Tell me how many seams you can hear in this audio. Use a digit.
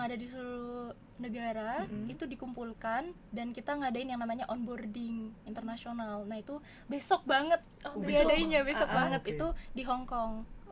0